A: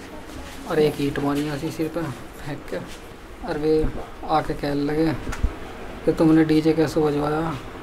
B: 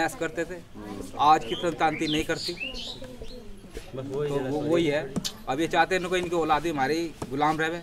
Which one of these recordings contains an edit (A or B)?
A